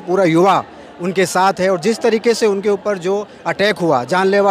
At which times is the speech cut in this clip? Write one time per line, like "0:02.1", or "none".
none